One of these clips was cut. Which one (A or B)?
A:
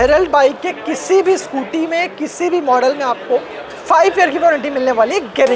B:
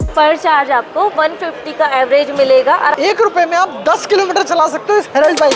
B